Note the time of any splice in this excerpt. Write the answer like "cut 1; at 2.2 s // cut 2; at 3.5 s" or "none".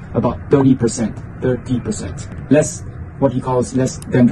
none